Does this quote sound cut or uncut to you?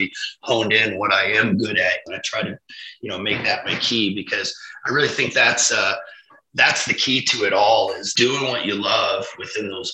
cut